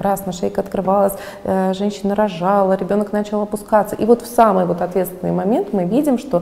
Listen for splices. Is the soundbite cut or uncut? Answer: uncut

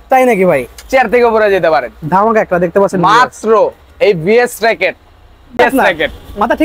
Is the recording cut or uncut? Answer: cut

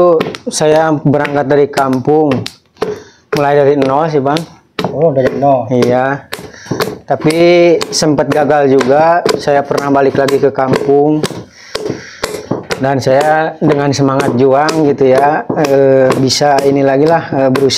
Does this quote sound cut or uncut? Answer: uncut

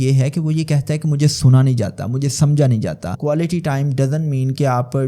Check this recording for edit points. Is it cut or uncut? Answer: cut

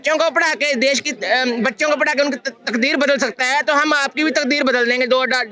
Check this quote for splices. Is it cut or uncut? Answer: uncut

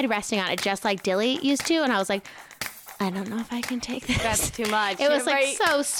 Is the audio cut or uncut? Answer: uncut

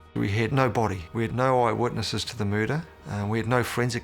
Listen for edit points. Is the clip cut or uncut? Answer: cut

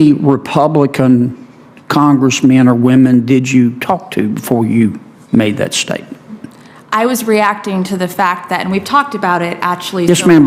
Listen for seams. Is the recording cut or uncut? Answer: uncut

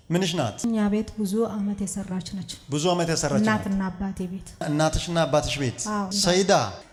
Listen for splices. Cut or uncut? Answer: uncut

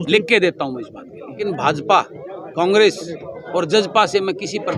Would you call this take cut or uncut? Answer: cut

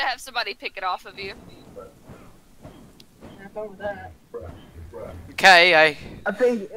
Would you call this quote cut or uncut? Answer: uncut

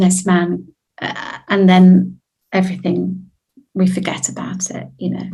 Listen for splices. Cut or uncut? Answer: uncut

